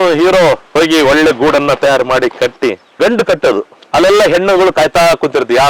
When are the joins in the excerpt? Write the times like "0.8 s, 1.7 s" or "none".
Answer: 2.9 s